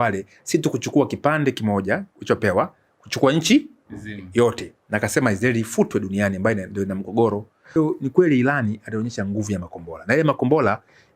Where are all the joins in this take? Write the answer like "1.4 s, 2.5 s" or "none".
7.8 s